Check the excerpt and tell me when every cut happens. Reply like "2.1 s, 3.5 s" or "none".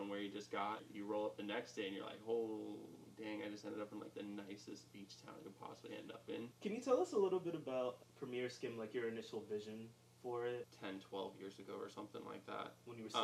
0.9 s, 6.5 s, 8.0 s, 10.7 s